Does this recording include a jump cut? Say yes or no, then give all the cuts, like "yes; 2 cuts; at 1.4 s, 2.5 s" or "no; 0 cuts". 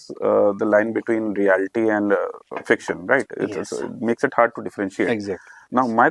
no; 0 cuts